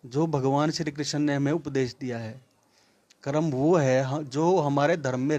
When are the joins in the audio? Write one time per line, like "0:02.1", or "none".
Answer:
none